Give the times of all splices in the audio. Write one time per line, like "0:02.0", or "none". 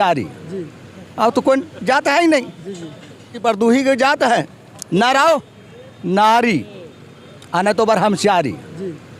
0:03.3